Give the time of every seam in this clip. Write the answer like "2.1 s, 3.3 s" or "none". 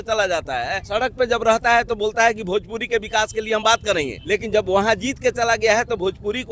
0.9 s, 4.2 s